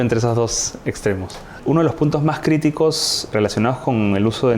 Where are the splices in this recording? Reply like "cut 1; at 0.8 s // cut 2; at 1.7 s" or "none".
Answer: cut 1; at 1.6 s // cut 2; at 3.3 s